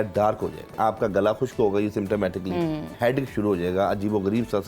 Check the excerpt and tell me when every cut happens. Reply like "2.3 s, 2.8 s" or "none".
0.7 s, 2.9 s